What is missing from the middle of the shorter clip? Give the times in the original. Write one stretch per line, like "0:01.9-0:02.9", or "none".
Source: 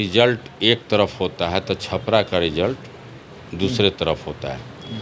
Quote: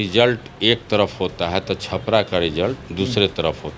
0:02.8-0:03.5